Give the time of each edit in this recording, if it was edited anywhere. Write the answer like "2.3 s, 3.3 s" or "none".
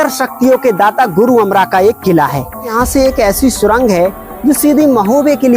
2.7 s